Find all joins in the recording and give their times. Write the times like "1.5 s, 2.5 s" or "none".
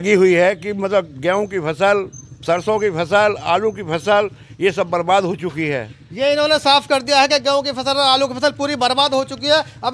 none